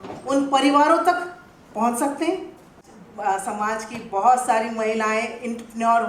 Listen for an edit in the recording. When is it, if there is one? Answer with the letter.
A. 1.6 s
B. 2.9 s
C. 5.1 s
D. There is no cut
B